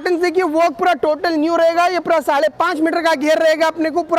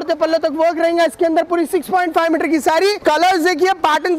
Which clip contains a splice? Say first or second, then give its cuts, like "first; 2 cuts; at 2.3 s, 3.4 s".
second; 1 cut; at 3.0 s